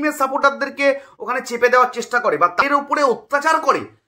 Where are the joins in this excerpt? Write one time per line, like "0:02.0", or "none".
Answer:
0:02.6